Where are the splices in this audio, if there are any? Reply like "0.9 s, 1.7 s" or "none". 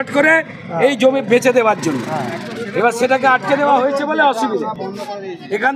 none